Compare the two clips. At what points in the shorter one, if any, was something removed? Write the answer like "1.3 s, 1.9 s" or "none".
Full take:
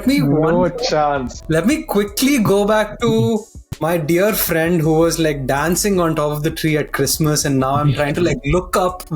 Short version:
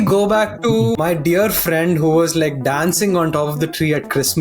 1.0 s